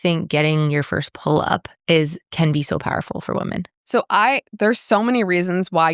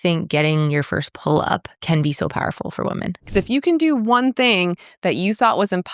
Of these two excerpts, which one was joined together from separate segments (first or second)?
second